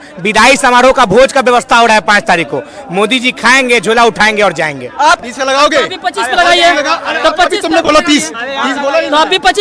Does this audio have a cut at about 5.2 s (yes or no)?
yes